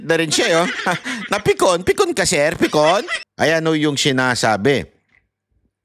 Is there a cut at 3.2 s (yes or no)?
yes